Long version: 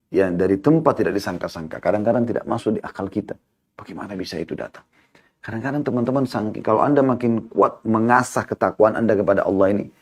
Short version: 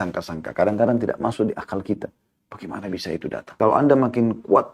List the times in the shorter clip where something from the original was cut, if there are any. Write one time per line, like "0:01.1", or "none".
0:03.5